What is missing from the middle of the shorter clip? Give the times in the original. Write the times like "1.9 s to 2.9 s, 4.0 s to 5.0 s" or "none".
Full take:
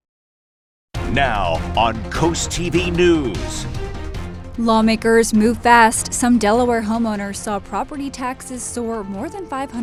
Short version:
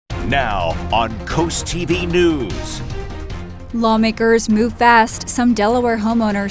none